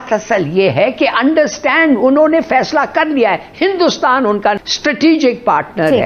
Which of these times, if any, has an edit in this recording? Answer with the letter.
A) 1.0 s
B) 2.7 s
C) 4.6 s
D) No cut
C